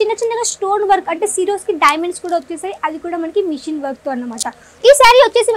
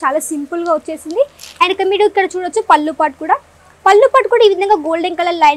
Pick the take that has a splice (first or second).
first